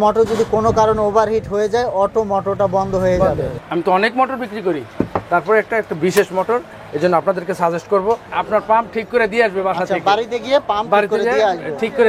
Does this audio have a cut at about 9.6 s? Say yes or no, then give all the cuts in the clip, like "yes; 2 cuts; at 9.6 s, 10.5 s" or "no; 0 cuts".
no; 2 cuts; at 3.6 s, 8.3 s